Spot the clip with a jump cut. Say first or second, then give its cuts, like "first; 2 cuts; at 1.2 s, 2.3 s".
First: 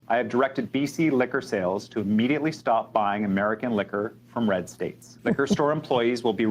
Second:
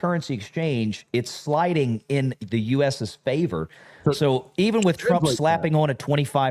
first; 1 cut; at 5.1 s